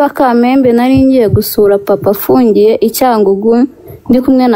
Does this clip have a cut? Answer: no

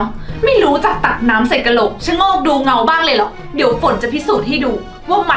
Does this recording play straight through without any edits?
no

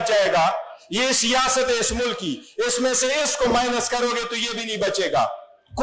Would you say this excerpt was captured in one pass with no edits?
yes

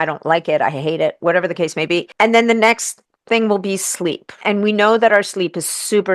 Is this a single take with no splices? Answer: no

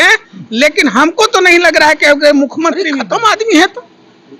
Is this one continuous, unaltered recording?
no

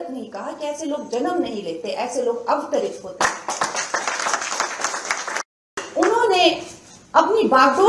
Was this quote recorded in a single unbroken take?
no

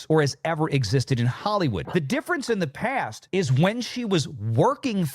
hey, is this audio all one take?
yes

